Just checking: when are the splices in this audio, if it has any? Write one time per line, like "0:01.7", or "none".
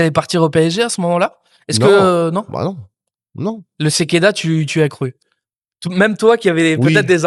none